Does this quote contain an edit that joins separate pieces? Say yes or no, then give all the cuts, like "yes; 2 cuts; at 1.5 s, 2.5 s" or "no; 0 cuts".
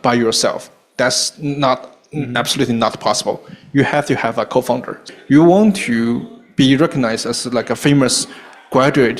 yes; 1 cut; at 5.0 s